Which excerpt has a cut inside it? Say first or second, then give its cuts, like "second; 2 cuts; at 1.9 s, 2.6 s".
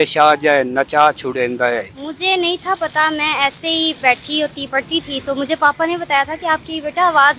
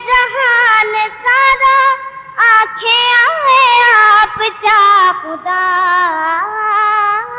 first; 1 cut; at 2.0 s